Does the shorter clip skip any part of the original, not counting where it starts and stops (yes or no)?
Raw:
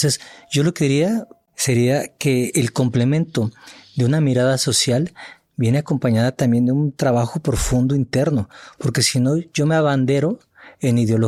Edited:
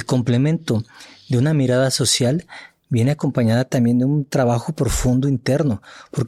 no